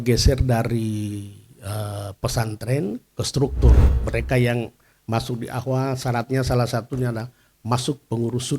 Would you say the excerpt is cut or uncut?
cut